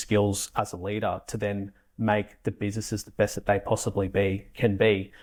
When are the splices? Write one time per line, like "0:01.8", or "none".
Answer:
none